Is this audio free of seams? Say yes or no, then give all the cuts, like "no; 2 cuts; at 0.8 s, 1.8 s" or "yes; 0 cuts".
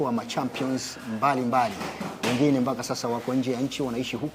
yes; 0 cuts